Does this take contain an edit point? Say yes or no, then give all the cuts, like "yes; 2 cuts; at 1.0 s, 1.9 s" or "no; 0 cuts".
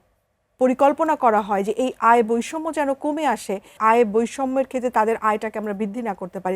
yes; 1 cut; at 3.8 s